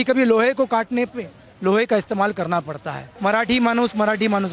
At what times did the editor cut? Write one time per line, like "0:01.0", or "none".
0:03.1

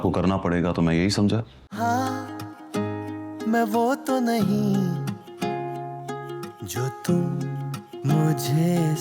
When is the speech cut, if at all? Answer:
0:01.6

